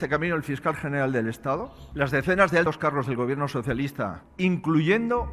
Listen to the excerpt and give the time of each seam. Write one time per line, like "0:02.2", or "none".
0:04.2